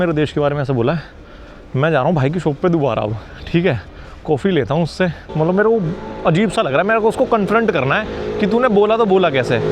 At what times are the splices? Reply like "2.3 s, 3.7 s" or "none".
none